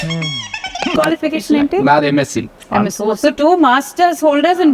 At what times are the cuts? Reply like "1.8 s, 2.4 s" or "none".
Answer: 0.9 s